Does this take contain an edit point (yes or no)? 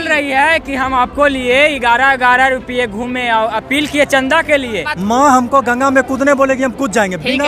yes